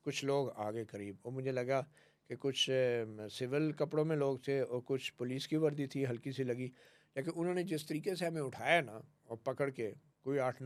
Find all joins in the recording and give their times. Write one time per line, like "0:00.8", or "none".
none